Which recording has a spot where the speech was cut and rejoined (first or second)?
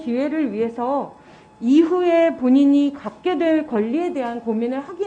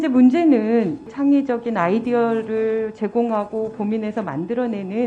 second